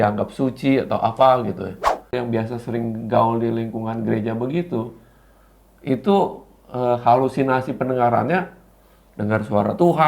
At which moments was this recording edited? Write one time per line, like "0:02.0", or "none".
0:02.1